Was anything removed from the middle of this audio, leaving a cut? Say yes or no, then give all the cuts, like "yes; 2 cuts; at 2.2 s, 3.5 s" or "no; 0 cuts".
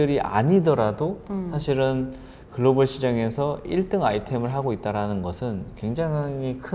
no; 0 cuts